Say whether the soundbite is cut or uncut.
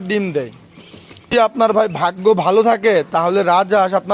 cut